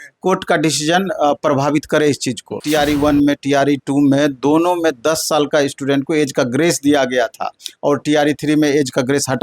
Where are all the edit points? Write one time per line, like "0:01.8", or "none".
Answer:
0:02.6